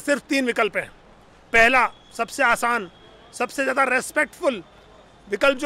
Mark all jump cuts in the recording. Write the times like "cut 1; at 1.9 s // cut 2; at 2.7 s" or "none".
none